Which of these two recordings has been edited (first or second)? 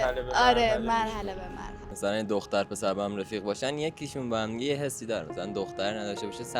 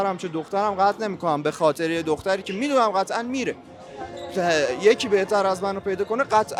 first